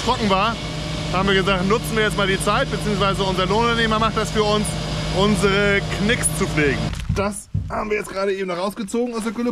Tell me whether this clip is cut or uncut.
cut